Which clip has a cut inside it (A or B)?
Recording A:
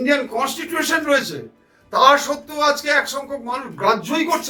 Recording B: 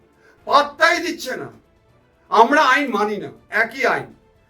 B